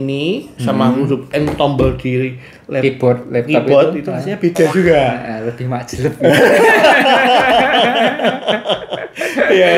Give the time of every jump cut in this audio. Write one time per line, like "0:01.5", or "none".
none